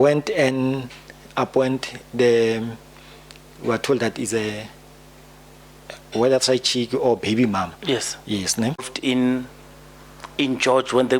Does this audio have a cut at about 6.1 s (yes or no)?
no